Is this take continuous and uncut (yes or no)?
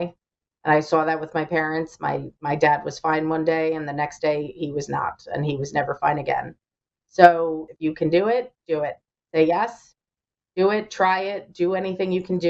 no